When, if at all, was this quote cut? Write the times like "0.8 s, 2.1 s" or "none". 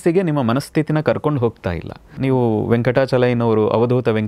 2.1 s